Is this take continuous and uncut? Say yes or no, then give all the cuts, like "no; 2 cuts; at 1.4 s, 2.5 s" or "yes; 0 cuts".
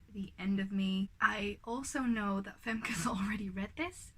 no; 1 cut; at 1.1 s